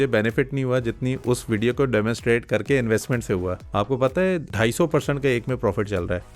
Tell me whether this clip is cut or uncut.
cut